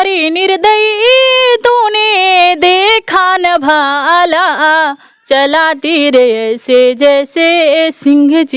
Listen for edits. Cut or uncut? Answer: uncut